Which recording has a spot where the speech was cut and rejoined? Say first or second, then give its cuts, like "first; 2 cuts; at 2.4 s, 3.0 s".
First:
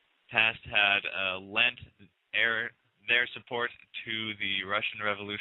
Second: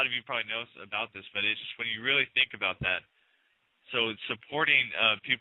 first; 1 cut; at 3.4 s